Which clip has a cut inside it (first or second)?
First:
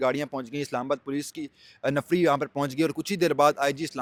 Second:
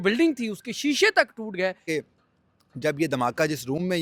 second